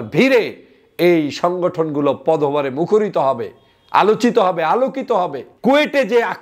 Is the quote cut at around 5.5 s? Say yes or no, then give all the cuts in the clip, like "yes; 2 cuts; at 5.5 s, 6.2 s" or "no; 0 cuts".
yes; 1 cut; at 5.5 s